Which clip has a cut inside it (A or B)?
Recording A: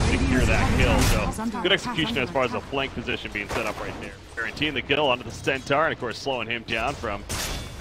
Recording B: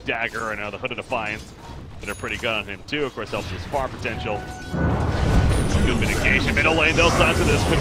A